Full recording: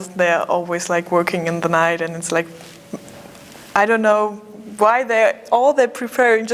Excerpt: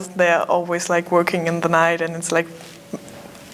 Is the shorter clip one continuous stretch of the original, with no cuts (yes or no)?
yes